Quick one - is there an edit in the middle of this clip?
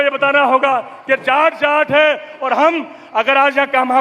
no; 0 cuts

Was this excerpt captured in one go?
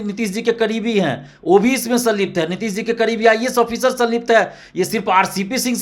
yes; 0 cuts

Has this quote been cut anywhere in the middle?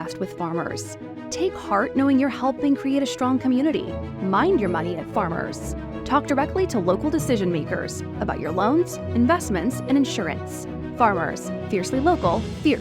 no; 0 cuts

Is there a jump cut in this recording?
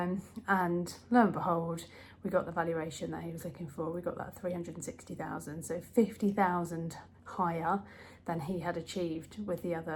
no; 0 cuts

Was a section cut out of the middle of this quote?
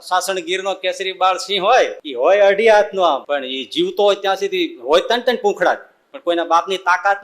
yes; 2 cuts; at 2.0 s, 3.2 s

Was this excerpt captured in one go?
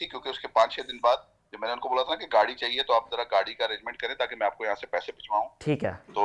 yes; 0 cuts

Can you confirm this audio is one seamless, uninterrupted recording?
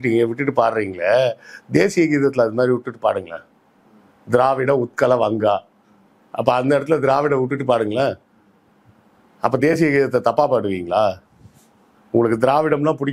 yes; 0 cuts

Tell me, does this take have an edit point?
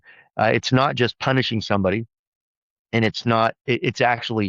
yes; 1 cut; at 3.6 s

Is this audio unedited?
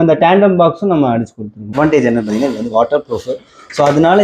no; 1 cut; at 1.7 s

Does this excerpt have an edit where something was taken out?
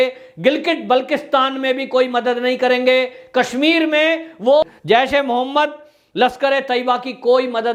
no; 0 cuts

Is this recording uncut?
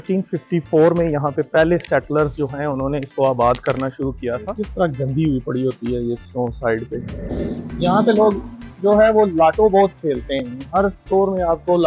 no; 2 cuts; at 4.5 s, 7.3 s

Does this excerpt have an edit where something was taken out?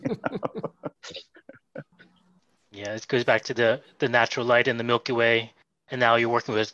no; 0 cuts

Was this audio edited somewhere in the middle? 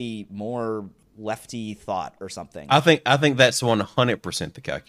yes; 2 cuts; at 1.0 s, 2.6 s

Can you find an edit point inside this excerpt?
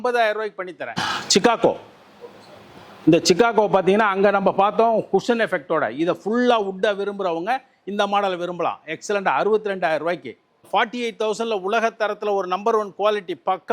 yes; 2 cuts; at 1.1 s, 10.6 s

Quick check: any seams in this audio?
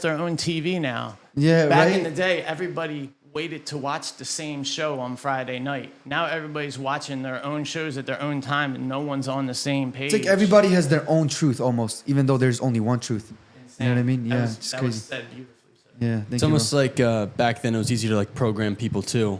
no; 0 cuts

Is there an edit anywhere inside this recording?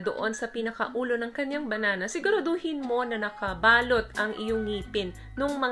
no; 0 cuts

